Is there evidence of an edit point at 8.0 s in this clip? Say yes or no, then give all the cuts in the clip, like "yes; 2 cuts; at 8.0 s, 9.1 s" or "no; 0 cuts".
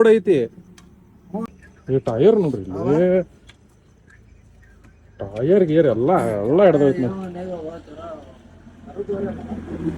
no; 1 cut; at 1.5 s